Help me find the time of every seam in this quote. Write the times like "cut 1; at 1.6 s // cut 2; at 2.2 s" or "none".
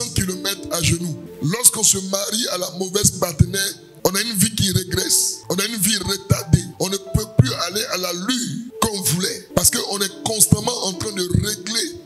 none